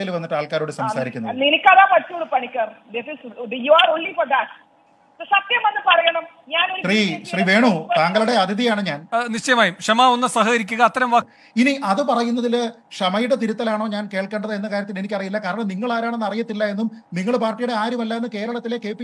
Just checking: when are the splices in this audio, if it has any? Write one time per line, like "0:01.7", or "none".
0:11.3